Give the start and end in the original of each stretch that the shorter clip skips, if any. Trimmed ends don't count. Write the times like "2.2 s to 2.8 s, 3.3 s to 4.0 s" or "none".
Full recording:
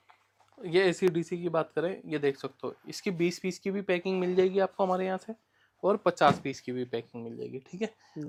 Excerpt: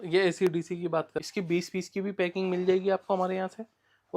1.7 s to 2.8 s